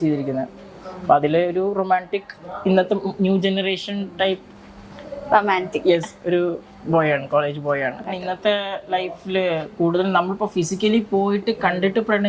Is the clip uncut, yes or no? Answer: no